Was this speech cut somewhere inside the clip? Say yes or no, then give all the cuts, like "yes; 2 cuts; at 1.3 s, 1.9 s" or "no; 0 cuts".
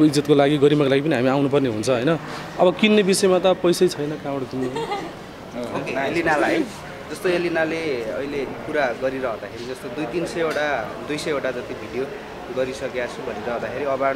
no; 0 cuts